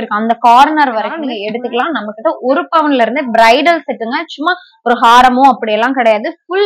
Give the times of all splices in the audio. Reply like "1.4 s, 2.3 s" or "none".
1.1 s